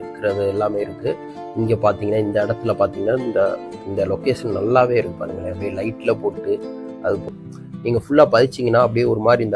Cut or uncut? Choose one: cut